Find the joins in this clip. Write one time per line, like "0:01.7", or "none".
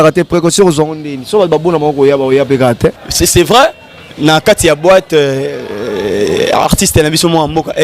0:03.0